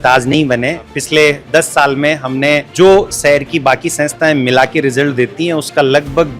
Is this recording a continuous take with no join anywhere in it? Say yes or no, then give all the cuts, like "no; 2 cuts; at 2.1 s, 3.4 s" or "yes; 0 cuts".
no; 2 cuts; at 0.9 s, 2.7 s